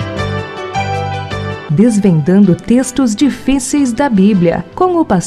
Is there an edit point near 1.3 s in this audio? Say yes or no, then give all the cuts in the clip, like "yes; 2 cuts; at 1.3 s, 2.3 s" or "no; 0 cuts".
yes; 1 cut; at 1.3 s